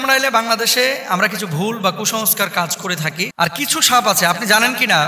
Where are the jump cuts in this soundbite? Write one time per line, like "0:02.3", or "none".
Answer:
0:03.3